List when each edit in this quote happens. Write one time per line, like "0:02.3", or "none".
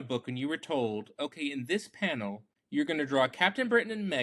0:02.5